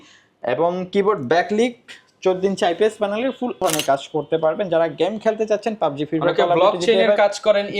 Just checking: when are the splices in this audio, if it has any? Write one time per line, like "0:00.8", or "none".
0:03.6